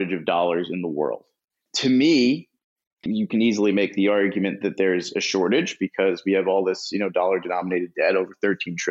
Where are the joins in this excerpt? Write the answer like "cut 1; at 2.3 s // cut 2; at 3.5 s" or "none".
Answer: cut 1; at 1.6 s // cut 2; at 3.1 s